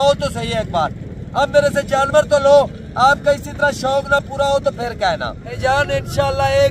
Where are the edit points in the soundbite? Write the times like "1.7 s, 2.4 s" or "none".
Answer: 5.6 s